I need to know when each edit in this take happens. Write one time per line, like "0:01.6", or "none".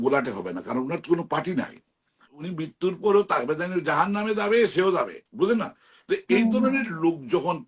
0:02.4